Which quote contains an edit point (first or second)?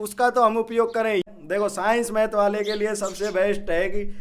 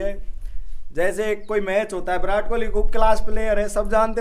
first